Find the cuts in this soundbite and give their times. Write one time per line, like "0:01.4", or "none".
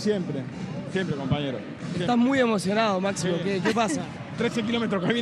none

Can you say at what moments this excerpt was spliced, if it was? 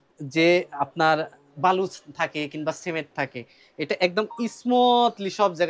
none

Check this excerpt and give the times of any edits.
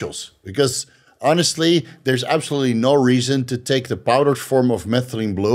none

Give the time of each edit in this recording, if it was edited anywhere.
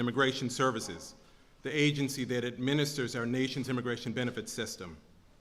none

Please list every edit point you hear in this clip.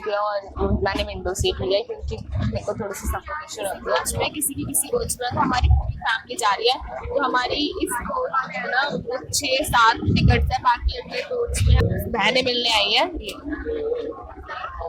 0:04.3
0:11.8

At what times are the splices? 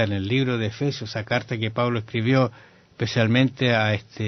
0:02.1

